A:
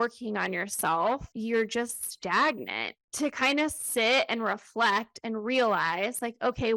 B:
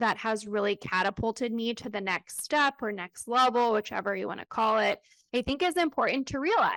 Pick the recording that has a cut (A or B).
A